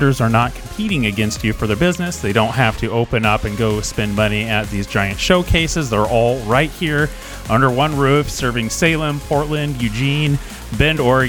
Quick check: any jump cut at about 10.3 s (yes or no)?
no